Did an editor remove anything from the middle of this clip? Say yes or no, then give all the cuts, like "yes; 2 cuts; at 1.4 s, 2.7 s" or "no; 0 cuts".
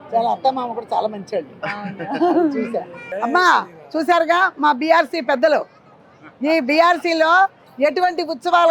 yes; 1 cut; at 3.1 s